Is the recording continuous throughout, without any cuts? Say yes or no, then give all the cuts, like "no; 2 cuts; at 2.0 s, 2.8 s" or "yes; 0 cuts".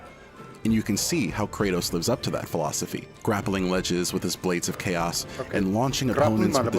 no; 1 cut; at 3.0 s